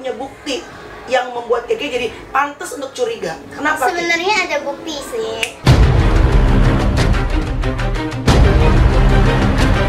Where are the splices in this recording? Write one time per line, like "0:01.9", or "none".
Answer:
none